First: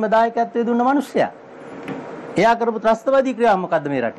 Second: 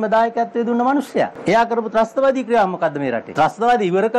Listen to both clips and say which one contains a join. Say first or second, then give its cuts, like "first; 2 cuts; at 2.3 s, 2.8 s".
second; 2 cuts; at 1.4 s, 3.3 s